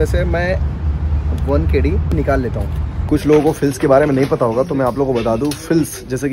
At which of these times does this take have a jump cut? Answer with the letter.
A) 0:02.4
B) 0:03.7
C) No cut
A